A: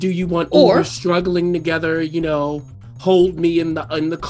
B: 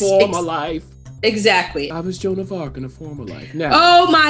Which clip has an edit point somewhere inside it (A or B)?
B